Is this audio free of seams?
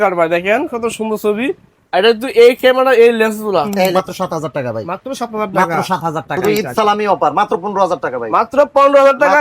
no; 2 cuts; at 4.0 s, 6.3 s

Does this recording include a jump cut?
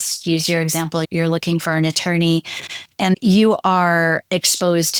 no; 0 cuts

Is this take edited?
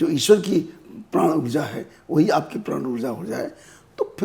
no; 0 cuts

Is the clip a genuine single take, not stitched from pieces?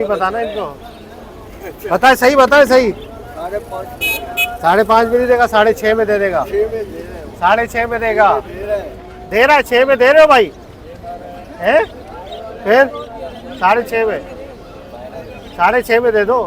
yes; 0 cuts

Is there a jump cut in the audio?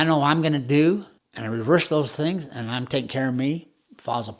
yes; 1 cut; at 1.1 s

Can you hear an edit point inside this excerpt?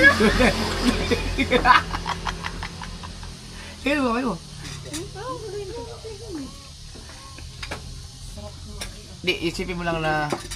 no; 0 cuts

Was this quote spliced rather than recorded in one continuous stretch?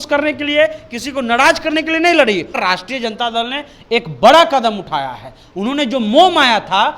yes; 1 cut; at 2.6 s

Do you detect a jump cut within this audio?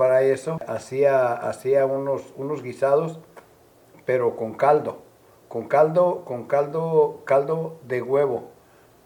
no; 0 cuts

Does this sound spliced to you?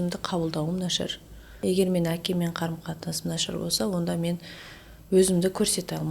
yes; 1 cut; at 1.6 s

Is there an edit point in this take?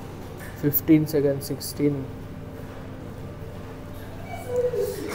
no; 0 cuts

